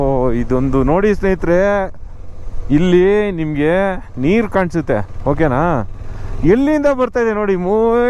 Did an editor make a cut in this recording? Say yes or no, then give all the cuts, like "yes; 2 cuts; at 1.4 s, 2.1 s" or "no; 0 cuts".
no; 0 cuts